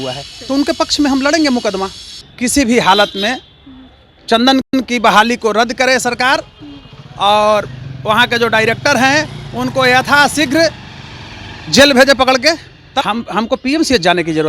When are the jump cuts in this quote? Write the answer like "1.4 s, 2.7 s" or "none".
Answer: 2.2 s, 13.0 s